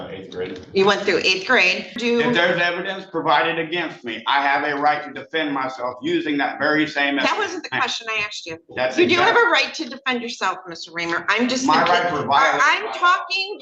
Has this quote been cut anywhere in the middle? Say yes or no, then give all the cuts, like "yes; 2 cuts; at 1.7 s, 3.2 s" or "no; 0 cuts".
yes; 1 cut; at 1.9 s